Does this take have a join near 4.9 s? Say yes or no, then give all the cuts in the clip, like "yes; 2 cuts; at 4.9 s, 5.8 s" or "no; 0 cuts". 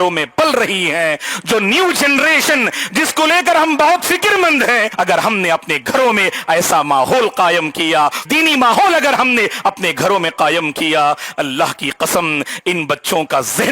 yes; 2 cuts; at 4.9 s, 8.2 s